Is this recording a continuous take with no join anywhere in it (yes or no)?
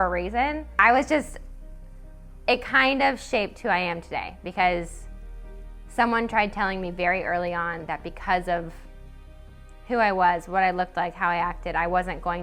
yes